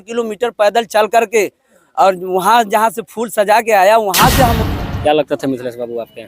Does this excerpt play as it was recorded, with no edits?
no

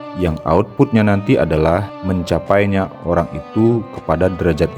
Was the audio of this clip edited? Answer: yes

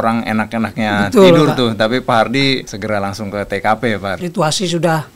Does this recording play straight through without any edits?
no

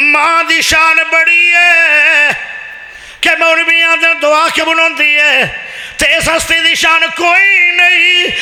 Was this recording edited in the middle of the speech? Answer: no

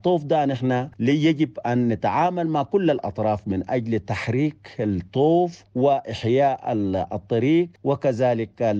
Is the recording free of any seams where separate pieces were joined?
no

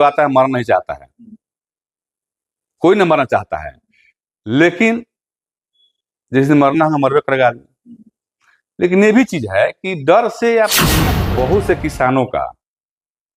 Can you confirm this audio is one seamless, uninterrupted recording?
no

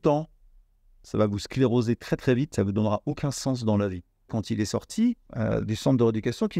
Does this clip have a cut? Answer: yes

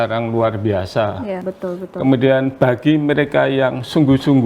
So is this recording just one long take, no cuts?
no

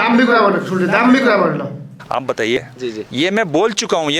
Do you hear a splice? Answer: yes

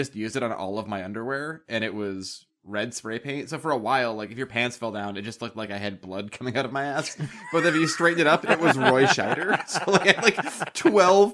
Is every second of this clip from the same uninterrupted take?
yes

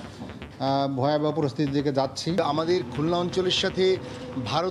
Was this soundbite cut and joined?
yes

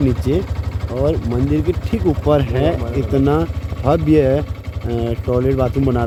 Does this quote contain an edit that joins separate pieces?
no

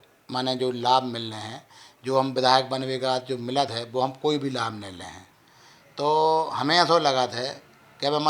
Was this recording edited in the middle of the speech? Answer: no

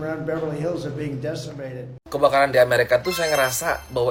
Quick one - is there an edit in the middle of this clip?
no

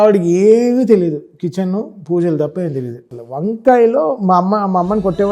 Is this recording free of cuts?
no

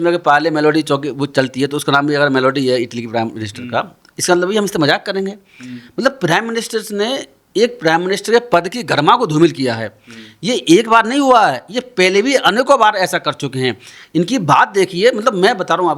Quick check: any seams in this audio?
no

